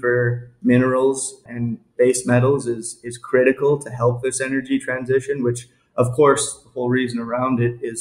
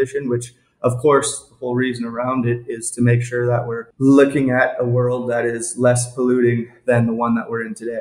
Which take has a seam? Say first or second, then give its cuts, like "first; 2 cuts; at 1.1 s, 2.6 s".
second; 1 cut; at 3.8 s